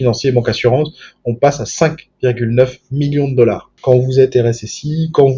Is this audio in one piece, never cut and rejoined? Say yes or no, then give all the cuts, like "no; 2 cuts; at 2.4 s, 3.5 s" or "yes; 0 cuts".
no; 1 cut; at 3.7 s